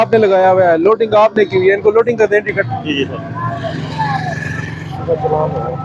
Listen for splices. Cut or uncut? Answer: uncut